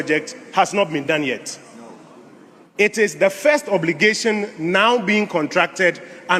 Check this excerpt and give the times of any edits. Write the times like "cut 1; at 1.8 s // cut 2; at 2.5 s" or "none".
none